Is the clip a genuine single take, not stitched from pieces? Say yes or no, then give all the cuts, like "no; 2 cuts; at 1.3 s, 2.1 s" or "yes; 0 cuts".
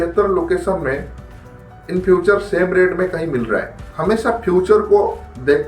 no; 1 cut; at 3.7 s